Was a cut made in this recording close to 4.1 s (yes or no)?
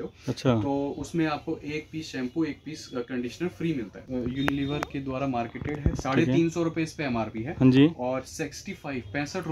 yes